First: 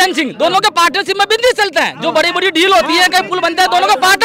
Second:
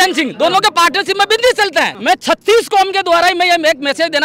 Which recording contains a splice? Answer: second; 1 cut; at 1.9 s

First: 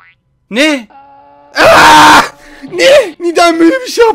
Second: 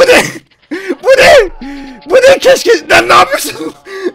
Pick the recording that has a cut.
first; 1 cut; at 3.2 s

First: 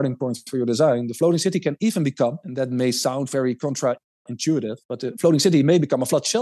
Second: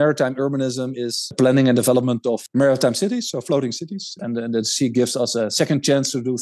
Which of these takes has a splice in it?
second; 3 cuts; at 1.3 s, 2.4 s, 4.1 s

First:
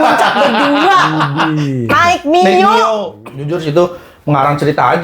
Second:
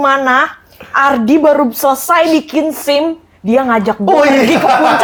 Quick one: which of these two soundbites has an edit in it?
first; 1 cut; at 3.2 s

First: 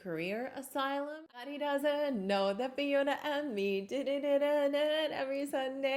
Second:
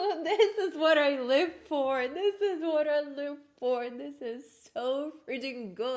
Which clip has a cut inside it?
first; 1 cut; at 1.5 s

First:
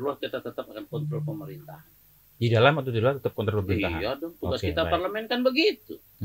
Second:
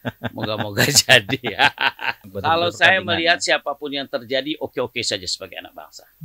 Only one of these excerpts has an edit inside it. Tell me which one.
second; 1 cut; at 2.3 s

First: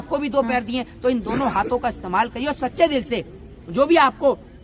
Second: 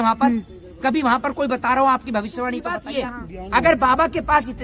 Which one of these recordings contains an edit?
second; 1 cut; at 2.9 s

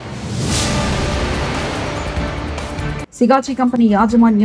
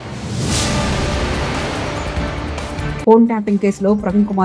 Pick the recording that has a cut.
first; 1 cut; at 2.9 s

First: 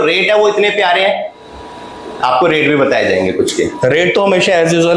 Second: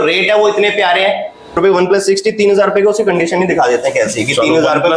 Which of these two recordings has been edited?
second; 1 cut; at 1.6 s

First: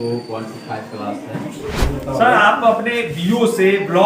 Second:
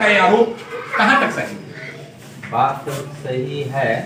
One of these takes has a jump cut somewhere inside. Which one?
first; 1 cut; at 1.8 s

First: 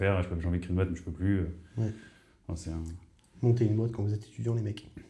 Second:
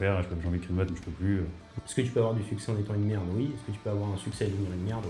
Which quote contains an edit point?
second; 1 cut; at 1.7 s

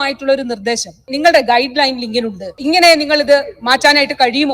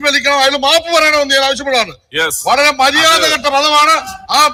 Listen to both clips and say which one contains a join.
first; 2 cuts; at 1.1 s, 2.6 s

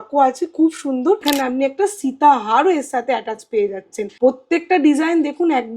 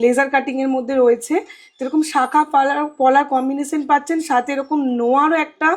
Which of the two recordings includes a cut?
first; 2 cuts; at 1.2 s, 4.0 s

